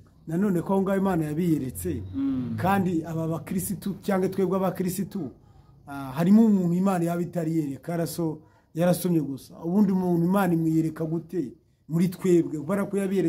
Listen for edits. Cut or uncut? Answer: uncut